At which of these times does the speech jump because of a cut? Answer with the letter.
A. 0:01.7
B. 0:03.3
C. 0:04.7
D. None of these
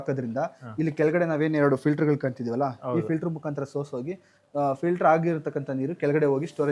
D